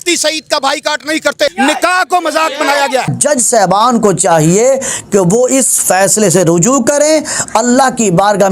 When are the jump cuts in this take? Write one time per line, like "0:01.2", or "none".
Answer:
0:01.5